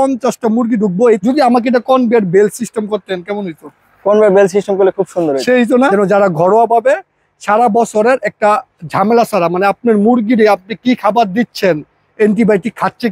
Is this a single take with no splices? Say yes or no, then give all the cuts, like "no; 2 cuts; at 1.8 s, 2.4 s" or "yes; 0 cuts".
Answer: no; 2 cuts; at 1.2 s, 5.9 s